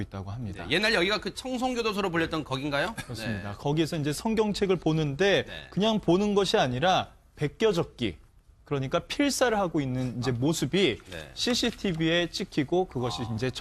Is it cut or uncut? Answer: cut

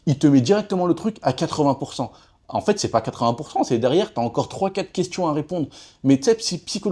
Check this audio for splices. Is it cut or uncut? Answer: uncut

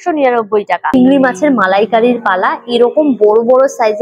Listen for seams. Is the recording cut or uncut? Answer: cut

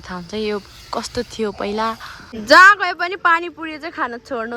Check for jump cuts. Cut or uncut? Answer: cut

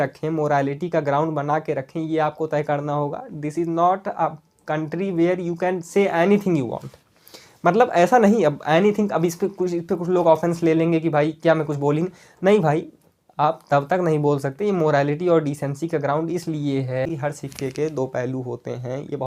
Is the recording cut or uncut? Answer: cut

